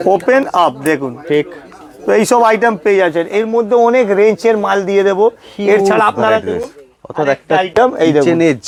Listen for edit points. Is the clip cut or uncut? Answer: uncut